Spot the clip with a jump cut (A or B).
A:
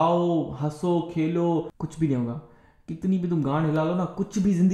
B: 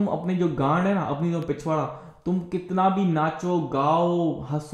A